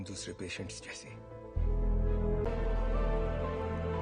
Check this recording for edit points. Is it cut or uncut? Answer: cut